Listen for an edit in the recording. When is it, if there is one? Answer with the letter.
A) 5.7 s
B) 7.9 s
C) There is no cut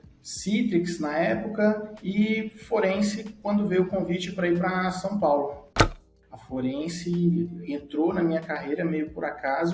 A